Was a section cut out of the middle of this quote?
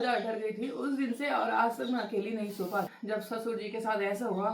yes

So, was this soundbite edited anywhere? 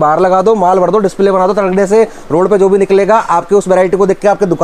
no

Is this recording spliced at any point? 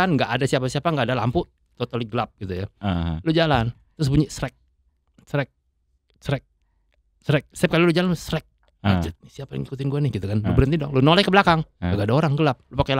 no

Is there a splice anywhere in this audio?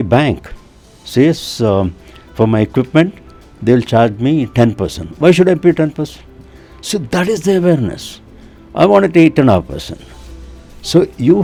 no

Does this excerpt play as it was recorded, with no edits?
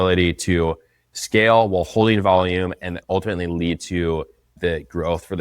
no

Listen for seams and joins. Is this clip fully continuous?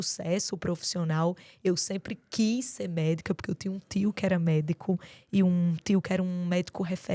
yes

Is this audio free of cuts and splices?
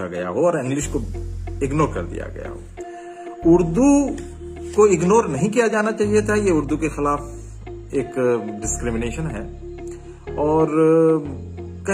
yes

